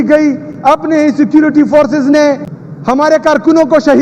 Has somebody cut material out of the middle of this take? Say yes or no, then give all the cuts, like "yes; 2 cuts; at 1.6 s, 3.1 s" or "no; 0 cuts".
yes; 1 cut; at 3.0 s